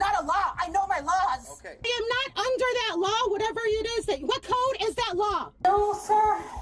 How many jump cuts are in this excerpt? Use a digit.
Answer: 2